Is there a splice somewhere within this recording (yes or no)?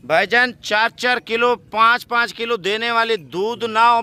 no